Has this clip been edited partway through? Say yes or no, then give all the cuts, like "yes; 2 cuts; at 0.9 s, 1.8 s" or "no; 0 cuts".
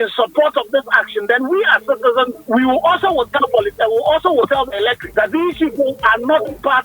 yes; 2 cuts; at 2.4 s, 5.0 s